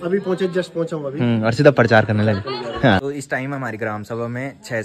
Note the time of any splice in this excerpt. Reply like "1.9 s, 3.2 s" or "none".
3.0 s